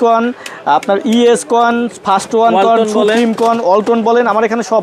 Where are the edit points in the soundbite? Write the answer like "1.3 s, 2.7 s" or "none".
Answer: none